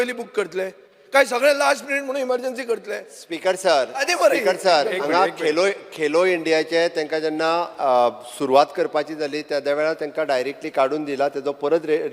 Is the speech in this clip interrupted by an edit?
no; 0 cuts

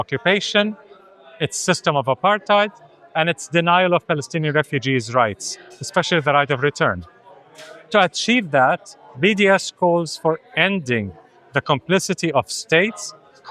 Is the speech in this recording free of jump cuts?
yes; 0 cuts

